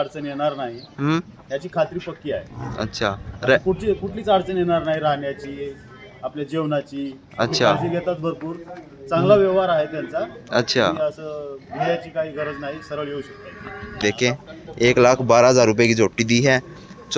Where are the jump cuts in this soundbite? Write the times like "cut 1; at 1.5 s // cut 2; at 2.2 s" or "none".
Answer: cut 1; at 14.0 s